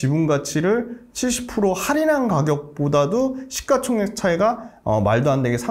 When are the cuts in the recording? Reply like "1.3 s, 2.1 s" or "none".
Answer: none